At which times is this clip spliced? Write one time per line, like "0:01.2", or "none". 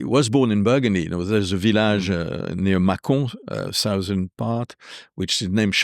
none